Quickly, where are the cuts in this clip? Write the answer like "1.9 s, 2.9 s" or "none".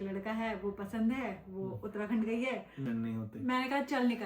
2.8 s